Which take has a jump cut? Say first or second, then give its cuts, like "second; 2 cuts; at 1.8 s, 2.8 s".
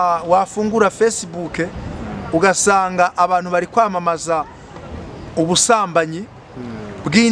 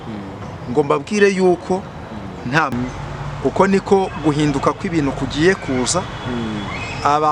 second; 1 cut; at 2.7 s